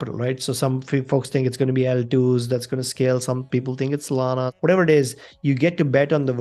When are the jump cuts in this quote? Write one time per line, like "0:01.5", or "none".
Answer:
0:04.5